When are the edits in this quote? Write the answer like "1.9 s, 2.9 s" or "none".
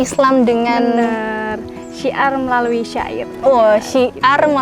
none